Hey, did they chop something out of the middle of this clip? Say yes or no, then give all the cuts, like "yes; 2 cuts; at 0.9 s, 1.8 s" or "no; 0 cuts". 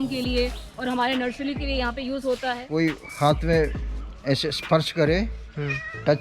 yes; 1 cut; at 2.6 s